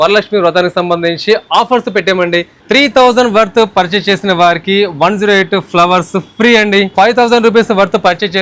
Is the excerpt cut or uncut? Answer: cut